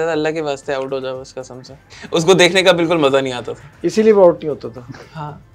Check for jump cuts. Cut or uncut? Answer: uncut